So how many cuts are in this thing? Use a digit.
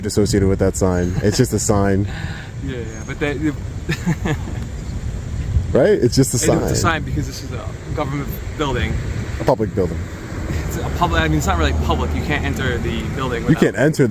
0